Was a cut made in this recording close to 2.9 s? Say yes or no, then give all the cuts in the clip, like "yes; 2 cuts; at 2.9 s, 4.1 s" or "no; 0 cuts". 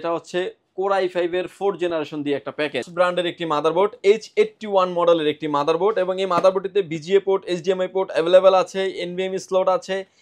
yes; 1 cut; at 2.9 s